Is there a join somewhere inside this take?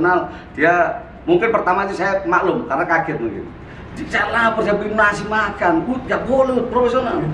no; 0 cuts

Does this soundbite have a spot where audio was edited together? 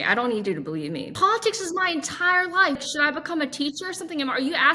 yes; 2 cuts; at 1.1 s, 2.8 s

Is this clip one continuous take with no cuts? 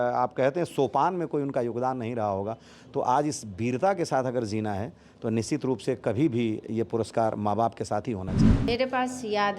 no; 1 cut; at 8.7 s

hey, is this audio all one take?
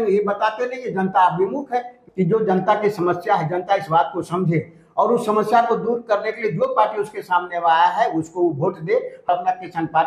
no; 2 cuts; at 2.0 s, 9.3 s

